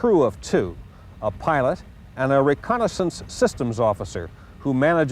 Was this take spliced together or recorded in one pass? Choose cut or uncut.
cut